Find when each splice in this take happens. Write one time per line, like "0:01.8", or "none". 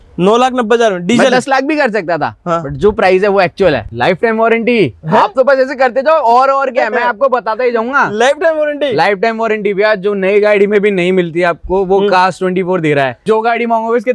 0:03.9
0:13.2